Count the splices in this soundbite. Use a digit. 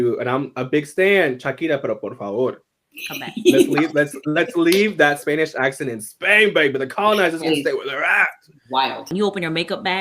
1